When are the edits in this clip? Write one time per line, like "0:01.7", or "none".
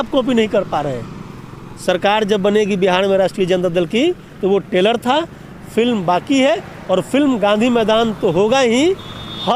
none